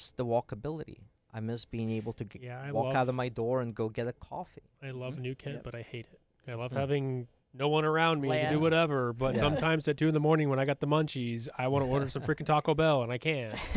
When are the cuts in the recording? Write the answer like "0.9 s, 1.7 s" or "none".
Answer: none